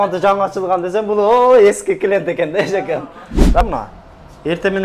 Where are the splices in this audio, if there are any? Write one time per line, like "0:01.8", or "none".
0:03.6